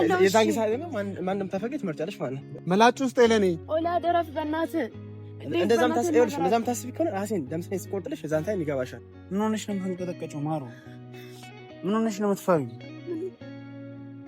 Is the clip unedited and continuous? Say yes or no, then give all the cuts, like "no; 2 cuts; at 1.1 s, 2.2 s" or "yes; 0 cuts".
no; 3 cuts; at 2.4 s, 9.0 s, 13.3 s